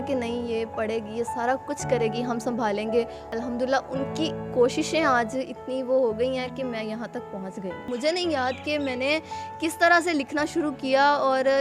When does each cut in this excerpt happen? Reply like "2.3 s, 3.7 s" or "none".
3.3 s, 7.9 s